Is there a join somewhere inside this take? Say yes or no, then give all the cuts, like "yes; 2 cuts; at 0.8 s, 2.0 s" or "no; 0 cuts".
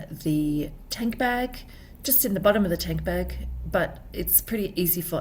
no; 0 cuts